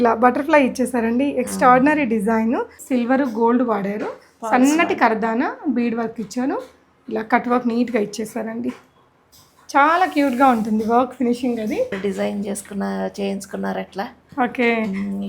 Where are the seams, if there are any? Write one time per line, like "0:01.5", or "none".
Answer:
0:02.8
0:12.0